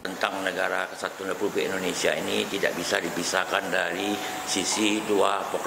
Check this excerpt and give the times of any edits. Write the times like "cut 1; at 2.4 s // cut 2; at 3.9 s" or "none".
none